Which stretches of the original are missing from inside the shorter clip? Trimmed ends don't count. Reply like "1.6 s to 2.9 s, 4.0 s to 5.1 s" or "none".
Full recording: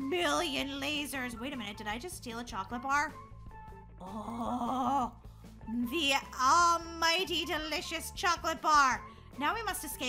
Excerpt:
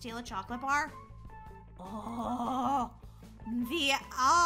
none